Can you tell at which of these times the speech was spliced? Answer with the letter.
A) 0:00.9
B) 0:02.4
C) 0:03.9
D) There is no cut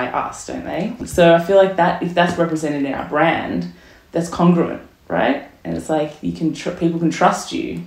A